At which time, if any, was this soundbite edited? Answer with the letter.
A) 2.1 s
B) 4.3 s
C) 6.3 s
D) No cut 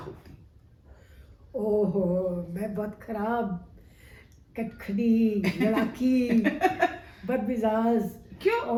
D